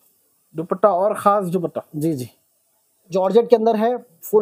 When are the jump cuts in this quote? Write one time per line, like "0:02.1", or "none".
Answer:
0:02.9